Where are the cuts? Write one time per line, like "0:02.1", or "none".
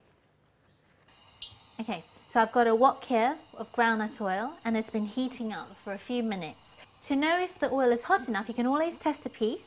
0:01.1